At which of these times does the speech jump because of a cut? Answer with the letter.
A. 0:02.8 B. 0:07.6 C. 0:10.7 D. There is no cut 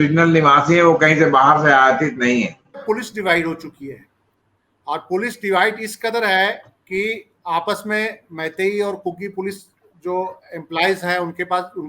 A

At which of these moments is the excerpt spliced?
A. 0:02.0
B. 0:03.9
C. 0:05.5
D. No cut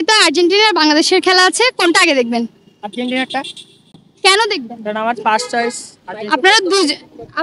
D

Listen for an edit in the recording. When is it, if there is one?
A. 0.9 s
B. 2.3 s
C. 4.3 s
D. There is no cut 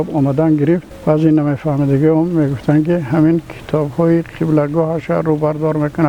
A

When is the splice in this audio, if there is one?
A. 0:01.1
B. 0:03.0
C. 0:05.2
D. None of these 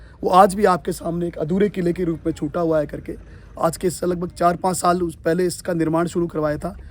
D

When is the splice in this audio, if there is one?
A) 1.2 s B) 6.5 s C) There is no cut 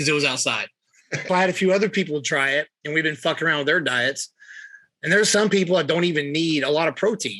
A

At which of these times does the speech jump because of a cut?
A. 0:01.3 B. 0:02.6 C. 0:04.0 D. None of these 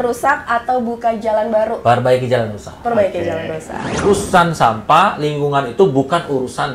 C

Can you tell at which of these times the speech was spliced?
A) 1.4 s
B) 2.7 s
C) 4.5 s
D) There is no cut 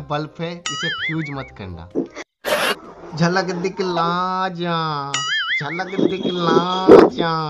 B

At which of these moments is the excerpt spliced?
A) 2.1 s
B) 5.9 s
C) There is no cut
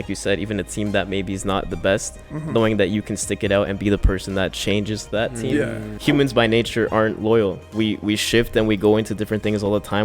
B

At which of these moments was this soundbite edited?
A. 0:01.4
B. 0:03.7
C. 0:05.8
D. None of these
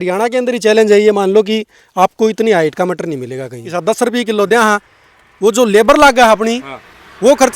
B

